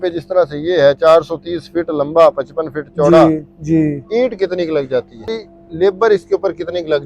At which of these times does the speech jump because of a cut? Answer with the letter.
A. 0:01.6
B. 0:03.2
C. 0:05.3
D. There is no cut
C